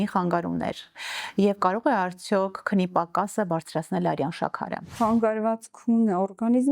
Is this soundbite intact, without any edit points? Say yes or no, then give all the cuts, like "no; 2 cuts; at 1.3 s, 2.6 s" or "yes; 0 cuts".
no; 1 cut; at 4.9 s